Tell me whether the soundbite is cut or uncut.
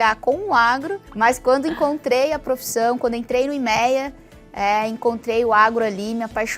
cut